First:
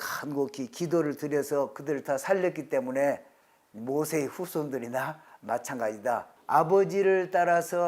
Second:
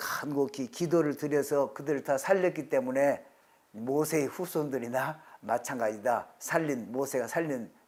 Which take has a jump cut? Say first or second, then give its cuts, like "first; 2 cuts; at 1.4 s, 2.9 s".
first; 1 cut; at 6.3 s